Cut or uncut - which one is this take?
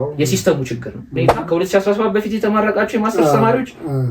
cut